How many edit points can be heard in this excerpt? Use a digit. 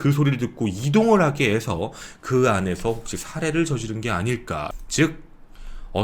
1